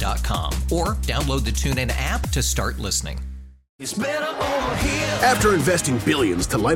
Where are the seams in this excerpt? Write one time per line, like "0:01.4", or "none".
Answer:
none